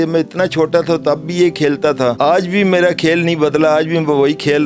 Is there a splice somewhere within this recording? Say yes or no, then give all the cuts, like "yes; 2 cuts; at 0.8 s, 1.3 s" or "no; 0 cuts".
yes; 1 cut; at 2.2 s